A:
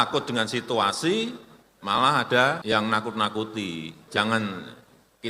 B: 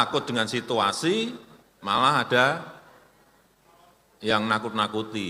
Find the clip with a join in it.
A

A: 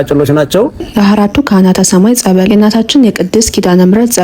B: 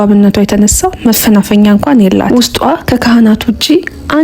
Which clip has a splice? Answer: A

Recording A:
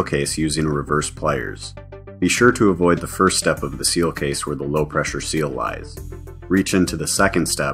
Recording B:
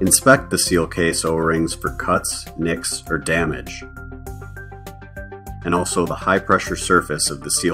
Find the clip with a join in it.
B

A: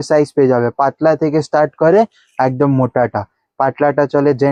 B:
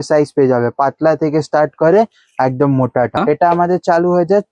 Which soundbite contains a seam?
B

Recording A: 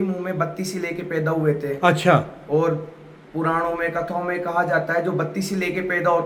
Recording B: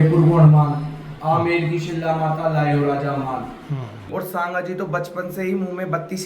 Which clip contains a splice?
B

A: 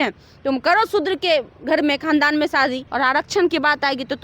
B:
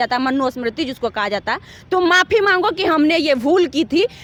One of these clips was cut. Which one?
A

